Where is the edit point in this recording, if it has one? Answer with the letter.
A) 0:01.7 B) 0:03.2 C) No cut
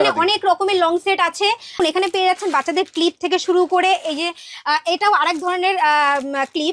A